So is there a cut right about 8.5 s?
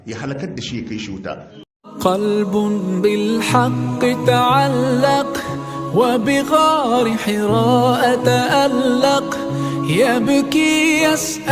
no; 1 cut; at 1.6 s

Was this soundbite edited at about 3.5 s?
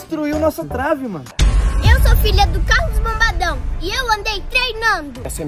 no; 1 cut; at 1.3 s

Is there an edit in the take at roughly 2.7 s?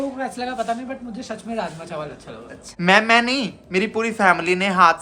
yes; 1 cut; at 2.7 s

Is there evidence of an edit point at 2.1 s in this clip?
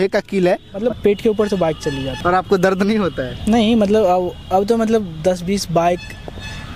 yes; 2 cuts; at 0.8 s, 2.1 s

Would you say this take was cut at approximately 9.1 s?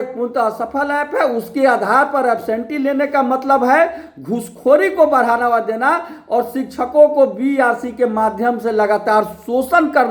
no; 0 cuts

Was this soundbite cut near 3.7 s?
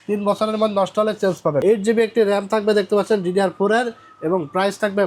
no; 1 cut; at 1.6 s

